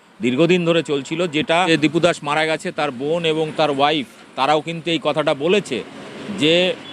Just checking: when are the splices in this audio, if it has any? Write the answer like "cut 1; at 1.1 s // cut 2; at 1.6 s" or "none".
cut 1; at 1.7 s